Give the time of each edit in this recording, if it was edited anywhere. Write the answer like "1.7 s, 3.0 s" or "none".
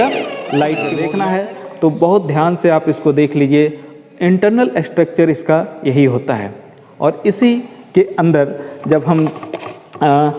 1.0 s